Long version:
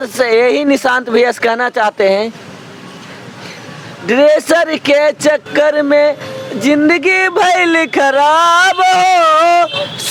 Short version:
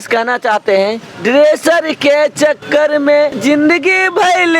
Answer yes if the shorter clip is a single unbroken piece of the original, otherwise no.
no